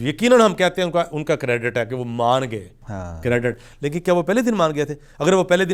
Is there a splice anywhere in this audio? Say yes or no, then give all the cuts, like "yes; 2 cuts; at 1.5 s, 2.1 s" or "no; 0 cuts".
no; 0 cuts